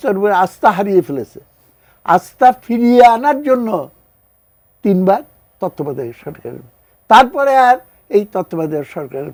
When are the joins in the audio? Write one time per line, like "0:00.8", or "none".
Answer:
none